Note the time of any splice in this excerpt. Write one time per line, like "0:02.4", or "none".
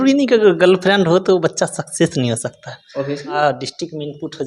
0:03.4